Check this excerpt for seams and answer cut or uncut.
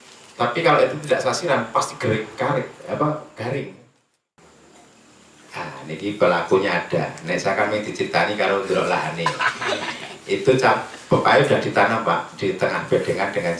cut